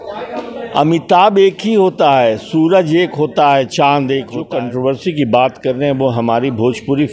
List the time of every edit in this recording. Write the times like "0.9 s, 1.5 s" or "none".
4.4 s